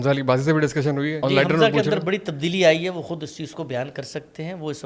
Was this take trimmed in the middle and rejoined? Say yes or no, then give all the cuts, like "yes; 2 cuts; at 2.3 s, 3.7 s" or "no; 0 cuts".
yes; 1 cut; at 1.2 s